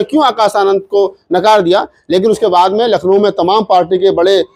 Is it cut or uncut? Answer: uncut